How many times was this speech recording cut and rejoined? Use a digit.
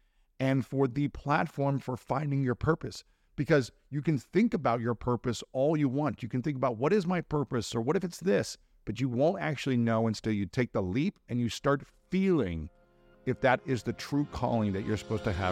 1